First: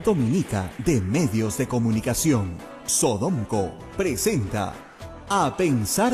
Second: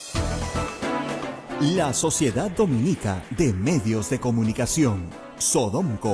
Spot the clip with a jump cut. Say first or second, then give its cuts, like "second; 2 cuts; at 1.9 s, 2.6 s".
second; 1 cut; at 1.1 s